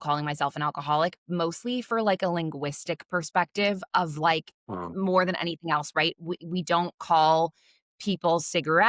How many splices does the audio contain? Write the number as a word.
zero